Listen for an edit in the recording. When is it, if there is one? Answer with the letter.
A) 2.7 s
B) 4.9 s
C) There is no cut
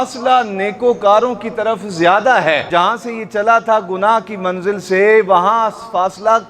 A